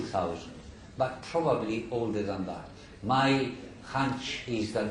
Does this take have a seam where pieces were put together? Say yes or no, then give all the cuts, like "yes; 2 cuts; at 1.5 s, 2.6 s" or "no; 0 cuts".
yes; 1 cut; at 1.2 s